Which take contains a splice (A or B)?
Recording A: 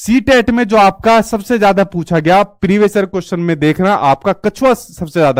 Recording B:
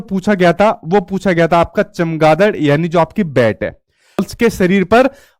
B